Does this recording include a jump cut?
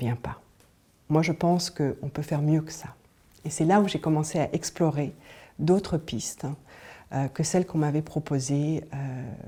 no; 0 cuts

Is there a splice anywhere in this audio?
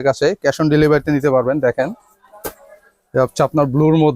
no; 0 cuts

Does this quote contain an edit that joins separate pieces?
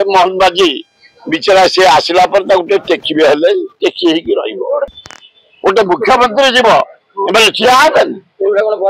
yes; 1 cut; at 5.0 s

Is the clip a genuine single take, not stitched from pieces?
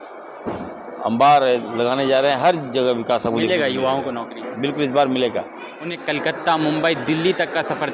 no; 1 cut; at 5.9 s

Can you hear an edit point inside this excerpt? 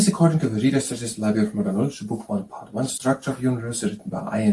yes; 1 cut; at 2.8 s

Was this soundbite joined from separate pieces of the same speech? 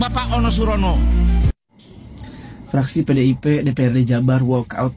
no; 0 cuts

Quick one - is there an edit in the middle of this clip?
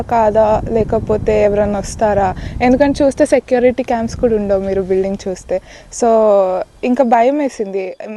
no; 0 cuts

